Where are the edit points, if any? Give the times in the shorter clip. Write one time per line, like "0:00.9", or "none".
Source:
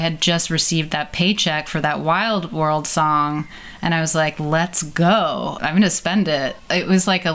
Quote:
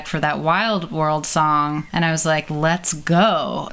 0:01.9

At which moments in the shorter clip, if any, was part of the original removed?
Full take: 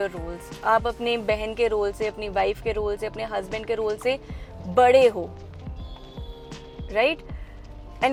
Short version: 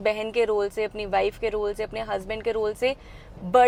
none

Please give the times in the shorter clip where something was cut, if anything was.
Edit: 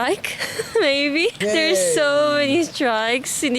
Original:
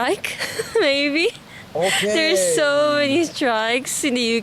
0:01.4

